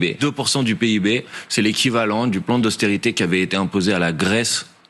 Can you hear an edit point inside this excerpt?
no; 0 cuts

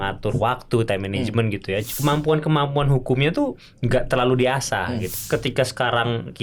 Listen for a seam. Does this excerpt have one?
yes; 2 cuts; at 1.9 s, 5.1 s

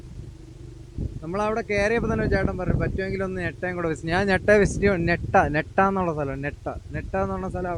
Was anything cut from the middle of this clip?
no; 0 cuts

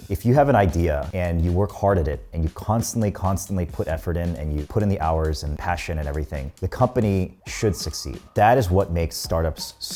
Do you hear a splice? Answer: no; 0 cuts

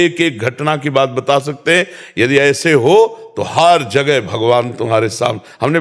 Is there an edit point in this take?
no; 0 cuts

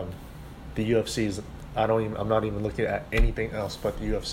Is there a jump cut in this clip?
no; 0 cuts

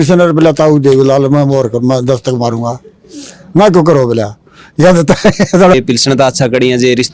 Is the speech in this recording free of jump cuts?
no; 1 cut; at 5.7 s

